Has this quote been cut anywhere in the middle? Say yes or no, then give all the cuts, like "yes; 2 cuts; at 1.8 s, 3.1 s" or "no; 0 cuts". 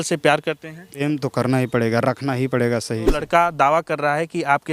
yes; 2 cuts; at 1.0 s, 3.2 s